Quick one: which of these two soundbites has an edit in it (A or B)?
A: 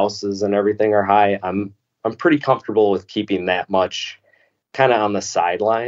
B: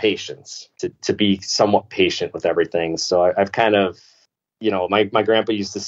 B